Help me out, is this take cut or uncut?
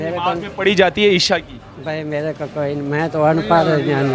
uncut